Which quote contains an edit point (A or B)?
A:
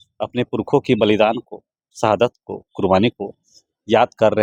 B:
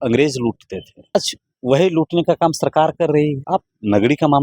B